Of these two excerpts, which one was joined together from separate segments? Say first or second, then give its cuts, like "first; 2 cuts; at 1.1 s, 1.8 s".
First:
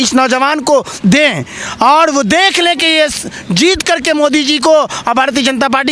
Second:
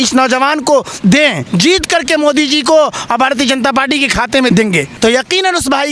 second; 2 cuts; at 1.4 s, 4.5 s